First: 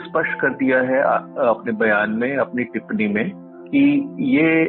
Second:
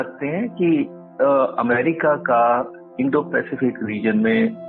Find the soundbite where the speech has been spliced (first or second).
second